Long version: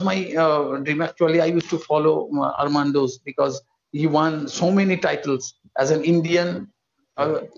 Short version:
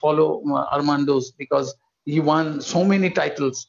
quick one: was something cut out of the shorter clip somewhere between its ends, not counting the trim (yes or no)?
no